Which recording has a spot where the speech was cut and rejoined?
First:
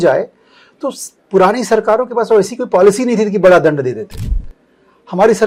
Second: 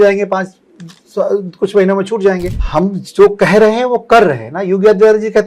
second; 1 cut; at 2.6 s

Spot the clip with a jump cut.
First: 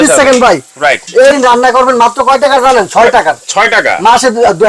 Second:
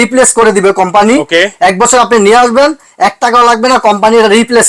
first; 1 cut; at 1.4 s

